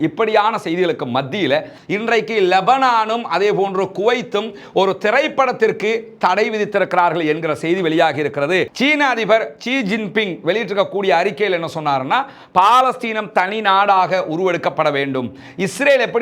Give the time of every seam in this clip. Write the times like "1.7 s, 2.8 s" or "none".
1.8 s, 8.7 s